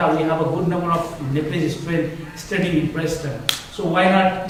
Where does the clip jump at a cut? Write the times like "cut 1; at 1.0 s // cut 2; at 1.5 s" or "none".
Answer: none